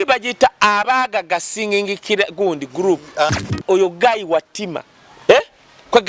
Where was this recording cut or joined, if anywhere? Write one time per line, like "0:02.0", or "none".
0:03.5